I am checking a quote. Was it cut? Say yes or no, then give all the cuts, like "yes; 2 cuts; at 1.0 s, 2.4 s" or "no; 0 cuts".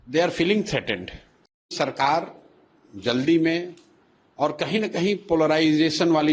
yes; 1 cut; at 1.7 s